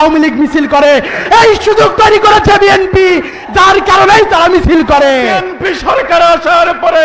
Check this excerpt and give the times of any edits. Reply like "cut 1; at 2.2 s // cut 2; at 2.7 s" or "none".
cut 1; at 5.5 s